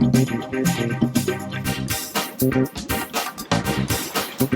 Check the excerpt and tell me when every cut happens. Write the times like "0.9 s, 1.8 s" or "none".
1.6 s